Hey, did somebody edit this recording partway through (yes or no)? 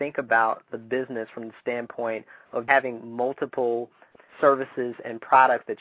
yes